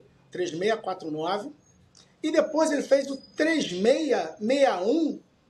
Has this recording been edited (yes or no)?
no